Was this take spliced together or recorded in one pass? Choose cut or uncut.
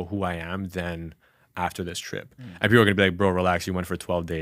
uncut